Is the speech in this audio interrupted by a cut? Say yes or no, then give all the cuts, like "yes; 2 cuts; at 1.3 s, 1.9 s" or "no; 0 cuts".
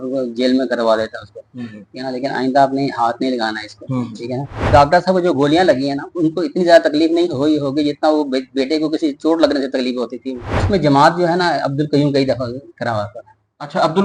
yes; 2 cuts; at 4.7 s, 10.5 s